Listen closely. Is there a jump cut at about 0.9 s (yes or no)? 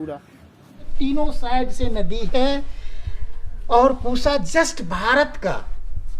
yes